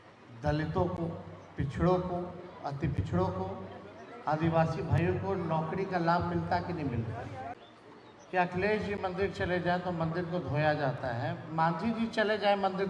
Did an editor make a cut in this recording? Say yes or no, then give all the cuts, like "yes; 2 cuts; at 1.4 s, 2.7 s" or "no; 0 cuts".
yes; 1 cut; at 7.6 s